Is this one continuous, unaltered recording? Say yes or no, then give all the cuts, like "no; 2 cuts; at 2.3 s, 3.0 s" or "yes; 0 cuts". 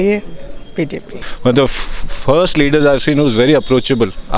no; 1 cut; at 1.2 s